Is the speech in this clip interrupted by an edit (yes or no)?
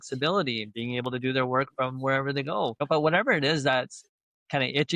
yes